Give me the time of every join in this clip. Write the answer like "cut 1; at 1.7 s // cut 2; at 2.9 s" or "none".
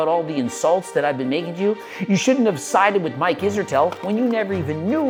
none